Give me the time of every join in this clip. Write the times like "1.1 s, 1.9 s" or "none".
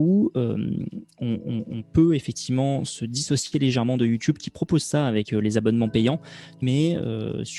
6.6 s